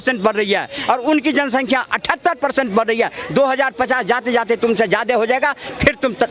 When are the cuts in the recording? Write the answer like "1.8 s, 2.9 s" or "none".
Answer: none